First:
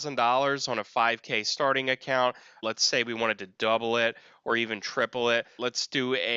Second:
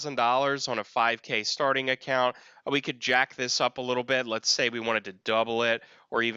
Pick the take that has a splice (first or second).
first